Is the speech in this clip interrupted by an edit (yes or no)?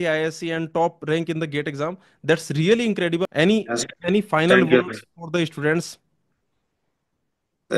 yes